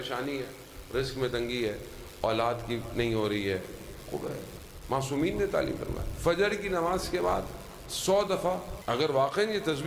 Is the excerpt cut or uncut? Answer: cut